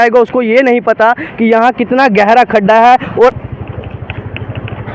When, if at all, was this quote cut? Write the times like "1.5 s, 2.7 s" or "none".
3.4 s